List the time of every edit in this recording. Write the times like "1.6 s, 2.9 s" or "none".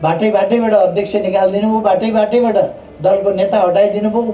none

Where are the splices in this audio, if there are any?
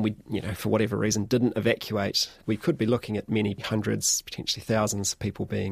2.4 s, 3.6 s

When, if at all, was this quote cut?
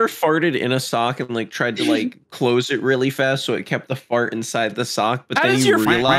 none

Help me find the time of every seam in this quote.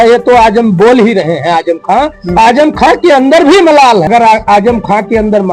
4.1 s

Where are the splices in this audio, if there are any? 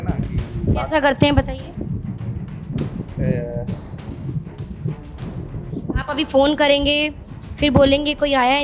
none

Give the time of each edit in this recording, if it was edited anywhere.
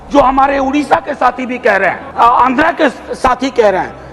2.0 s

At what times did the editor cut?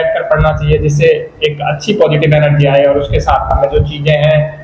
3.5 s

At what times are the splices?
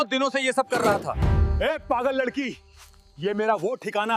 1.0 s

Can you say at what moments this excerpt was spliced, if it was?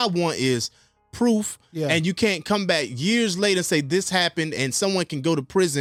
none

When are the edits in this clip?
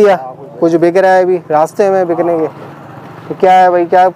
none

